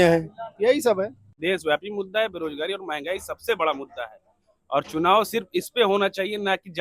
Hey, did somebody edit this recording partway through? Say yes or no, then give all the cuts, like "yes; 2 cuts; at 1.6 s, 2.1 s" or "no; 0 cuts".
yes; 1 cut; at 1.2 s